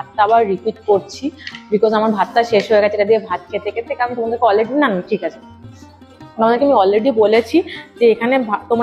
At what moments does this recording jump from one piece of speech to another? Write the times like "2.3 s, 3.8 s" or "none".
none